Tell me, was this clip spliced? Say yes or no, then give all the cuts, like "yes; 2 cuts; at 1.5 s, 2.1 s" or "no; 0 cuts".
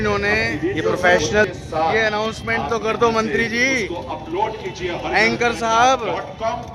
yes; 1 cut; at 1.4 s